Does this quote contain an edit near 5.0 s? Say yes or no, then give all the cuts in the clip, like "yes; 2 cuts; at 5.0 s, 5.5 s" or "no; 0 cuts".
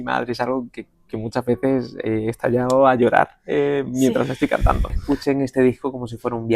yes; 1 cut; at 5.0 s